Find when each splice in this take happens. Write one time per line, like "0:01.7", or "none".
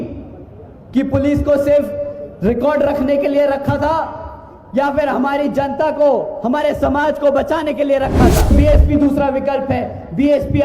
0:08.5